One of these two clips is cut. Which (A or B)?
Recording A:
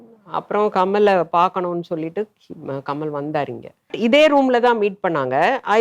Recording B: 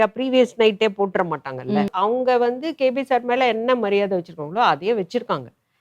B